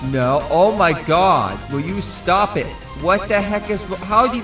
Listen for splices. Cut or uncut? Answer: uncut